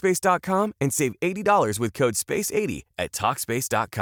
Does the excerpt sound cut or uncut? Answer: uncut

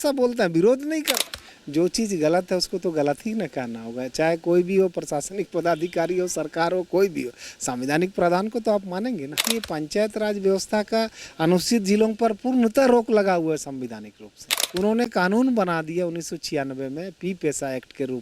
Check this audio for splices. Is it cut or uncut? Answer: cut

